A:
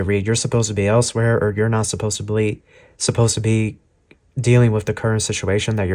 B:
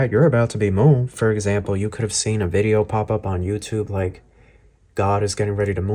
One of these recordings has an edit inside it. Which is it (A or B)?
B